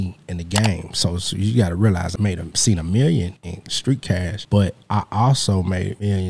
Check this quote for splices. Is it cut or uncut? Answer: cut